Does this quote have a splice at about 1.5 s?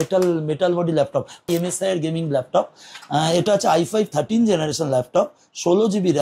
yes; 1 cut; at 1.5 s

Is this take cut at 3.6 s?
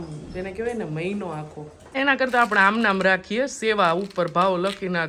no; 1 cut; at 1.9 s

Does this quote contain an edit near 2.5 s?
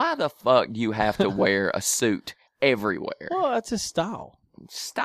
no; 0 cuts

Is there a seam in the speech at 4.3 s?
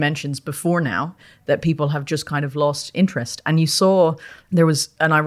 yes; 1 cut; at 4.3 s

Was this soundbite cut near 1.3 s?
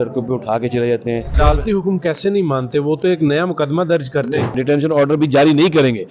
yes; 2 cuts; at 1.3 s, 4.5 s

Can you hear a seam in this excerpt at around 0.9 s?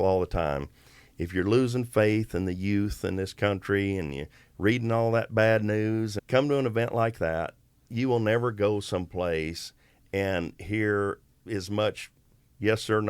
no; 3 cuts; at 6.2 s, 7.9 s, 11.3 s

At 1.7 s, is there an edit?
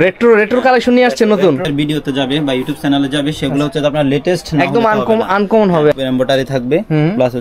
yes; 2 cuts; at 1.7 s, 5.9 s

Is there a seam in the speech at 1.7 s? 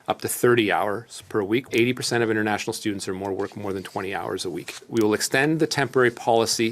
yes; 2 cuts; at 1.7 s, 4.8 s

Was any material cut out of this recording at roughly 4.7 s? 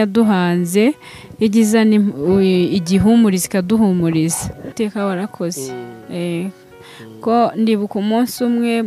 yes; 1 cut; at 4.7 s

